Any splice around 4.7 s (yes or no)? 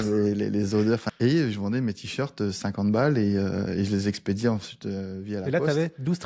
no